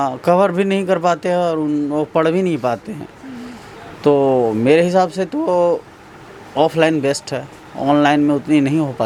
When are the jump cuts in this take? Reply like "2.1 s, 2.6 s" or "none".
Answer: none